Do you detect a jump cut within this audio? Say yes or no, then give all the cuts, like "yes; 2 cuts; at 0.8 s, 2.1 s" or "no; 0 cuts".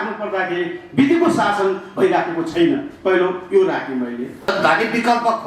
yes; 1 cut; at 4.5 s